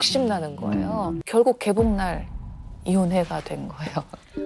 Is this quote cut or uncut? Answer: cut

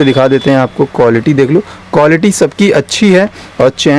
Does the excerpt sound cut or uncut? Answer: uncut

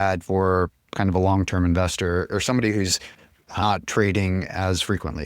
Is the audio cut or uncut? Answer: cut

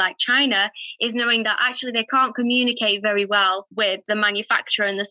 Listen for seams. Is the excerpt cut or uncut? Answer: cut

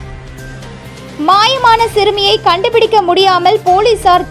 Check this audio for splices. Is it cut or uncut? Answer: uncut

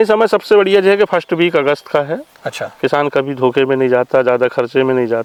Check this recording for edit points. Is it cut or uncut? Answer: uncut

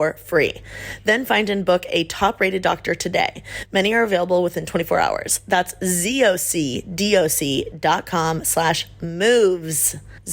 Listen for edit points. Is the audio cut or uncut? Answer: uncut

